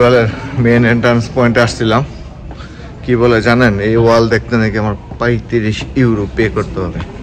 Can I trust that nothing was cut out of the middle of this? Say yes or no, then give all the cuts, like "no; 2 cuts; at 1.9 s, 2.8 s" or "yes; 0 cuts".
yes; 0 cuts